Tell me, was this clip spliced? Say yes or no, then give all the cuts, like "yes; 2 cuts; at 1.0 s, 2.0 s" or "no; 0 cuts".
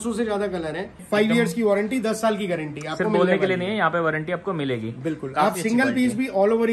yes; 1 cut; at 0.9 s